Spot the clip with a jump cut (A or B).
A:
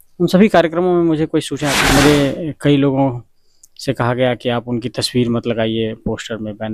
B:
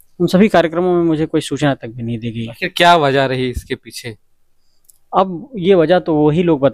A